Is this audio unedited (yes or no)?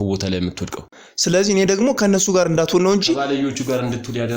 no